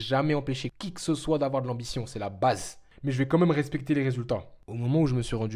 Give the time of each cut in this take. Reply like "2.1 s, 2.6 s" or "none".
2.8 s, 4.4 s